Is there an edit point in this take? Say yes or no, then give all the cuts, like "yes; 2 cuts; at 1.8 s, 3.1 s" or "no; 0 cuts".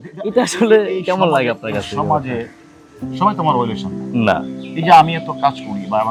no; 0 cuts